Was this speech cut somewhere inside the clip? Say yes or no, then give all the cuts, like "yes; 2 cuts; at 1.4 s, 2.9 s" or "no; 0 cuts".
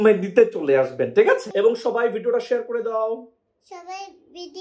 yes; 1 cut; at 1.5 s